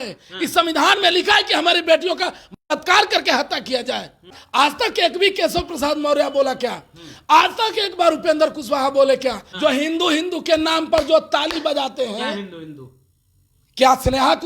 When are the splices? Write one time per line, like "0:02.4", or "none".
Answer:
0:04.4
0:09.5